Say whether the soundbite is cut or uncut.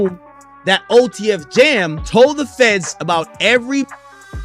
cut